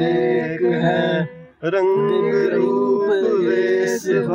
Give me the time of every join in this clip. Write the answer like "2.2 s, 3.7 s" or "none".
none

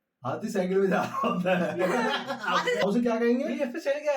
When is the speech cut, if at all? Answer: 2.8 s

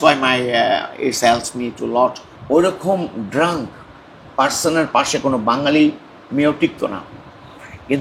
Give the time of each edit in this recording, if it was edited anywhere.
2.3 s

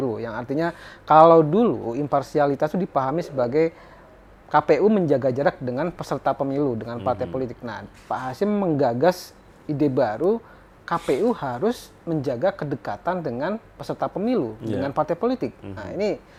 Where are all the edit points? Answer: none

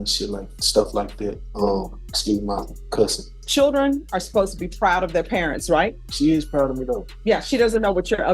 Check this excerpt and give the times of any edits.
1.4 s, 3.4 s, 6.0 s, 7.1 s

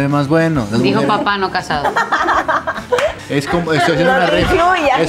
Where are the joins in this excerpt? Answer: 3.2 s

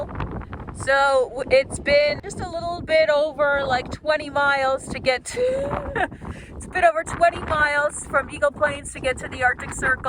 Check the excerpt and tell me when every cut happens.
2.2 s

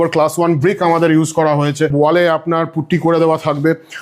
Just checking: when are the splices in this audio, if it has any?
1.9 s

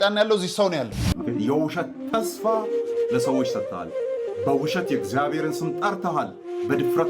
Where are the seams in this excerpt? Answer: 1.1 s

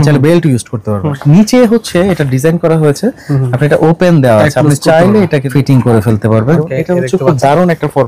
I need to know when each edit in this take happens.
1.1 s, 5.5 s, 6.6 s

